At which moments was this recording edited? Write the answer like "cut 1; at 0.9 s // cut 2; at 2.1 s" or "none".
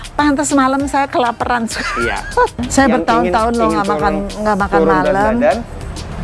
cut 1; at 2.7 s